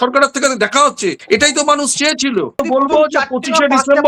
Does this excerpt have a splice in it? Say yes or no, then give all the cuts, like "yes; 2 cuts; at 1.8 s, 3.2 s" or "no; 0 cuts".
yes; 1 cut; at 2.6 s